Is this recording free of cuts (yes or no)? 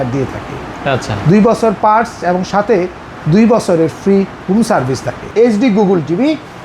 no